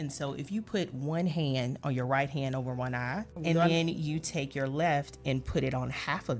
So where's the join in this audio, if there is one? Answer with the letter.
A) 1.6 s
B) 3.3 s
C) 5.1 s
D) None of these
B